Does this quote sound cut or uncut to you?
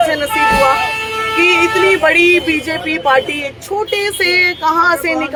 uncut